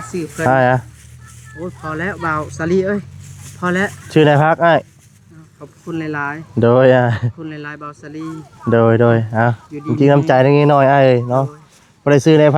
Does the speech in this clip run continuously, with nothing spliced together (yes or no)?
yes